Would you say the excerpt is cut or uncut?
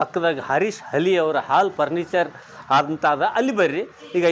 uncut